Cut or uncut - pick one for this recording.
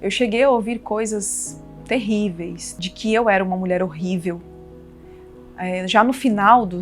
uncut